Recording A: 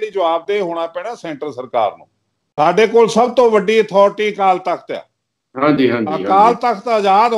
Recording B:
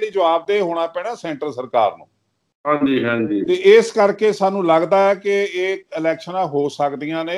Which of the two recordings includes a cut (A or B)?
A